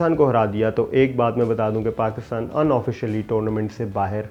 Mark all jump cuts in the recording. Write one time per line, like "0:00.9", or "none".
none